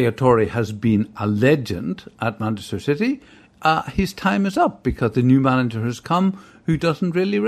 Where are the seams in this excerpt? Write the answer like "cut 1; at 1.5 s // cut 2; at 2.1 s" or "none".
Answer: none